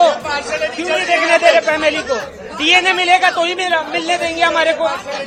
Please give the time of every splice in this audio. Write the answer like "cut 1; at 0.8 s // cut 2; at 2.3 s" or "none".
none